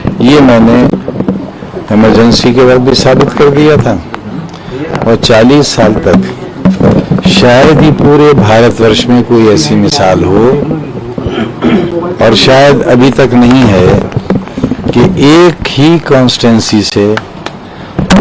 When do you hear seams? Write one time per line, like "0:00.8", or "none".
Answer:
none